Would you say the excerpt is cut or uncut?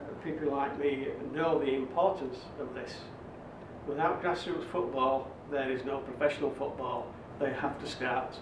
uncut